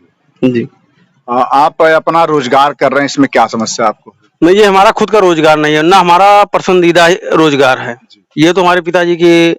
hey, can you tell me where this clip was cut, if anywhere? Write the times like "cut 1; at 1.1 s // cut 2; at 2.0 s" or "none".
none

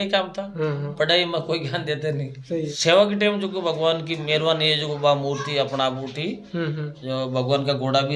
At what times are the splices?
cut 1; at 2.6 s

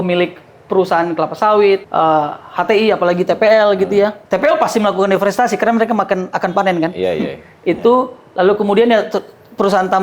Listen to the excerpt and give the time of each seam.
cut 1; at 1.9 s // cut 2; at 4.2 s

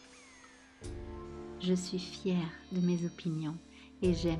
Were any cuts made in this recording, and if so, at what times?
cut 1; at 1.4 s

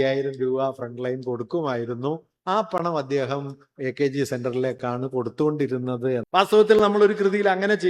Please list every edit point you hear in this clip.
cut 1; at 6.3 s

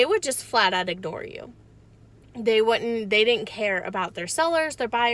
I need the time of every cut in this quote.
none

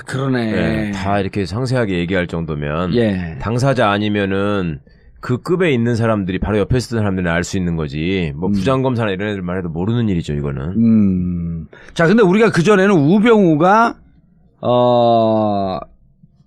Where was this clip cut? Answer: none

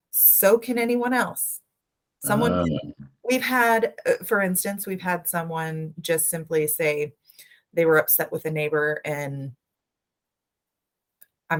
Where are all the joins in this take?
none

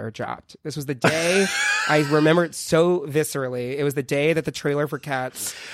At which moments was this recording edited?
none

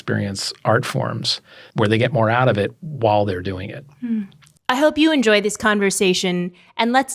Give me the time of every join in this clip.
cut 1; at 1.6 s // cut 2; at 4.4 s

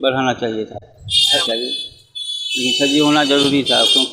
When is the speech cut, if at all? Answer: cut 1; at 1.4 s

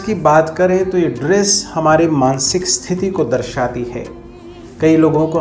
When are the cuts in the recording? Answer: none

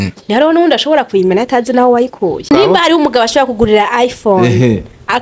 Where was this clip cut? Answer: cut 1; at 2.4 s

